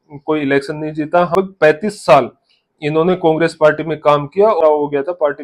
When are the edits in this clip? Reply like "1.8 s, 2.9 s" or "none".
1.3 s, 4.6 s